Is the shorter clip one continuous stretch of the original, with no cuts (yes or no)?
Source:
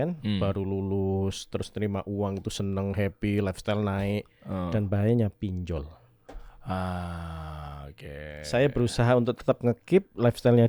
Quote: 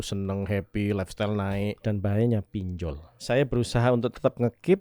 no